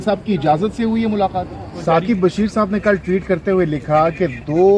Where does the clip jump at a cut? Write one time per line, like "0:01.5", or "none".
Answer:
0:01.8